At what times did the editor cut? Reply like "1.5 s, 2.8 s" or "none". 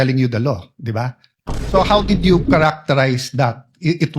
1.3 s